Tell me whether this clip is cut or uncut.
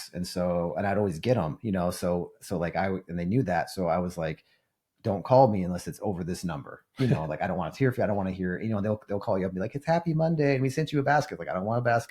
uncut